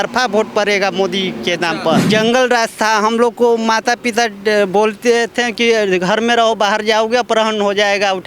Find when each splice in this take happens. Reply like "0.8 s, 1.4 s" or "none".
2.1 s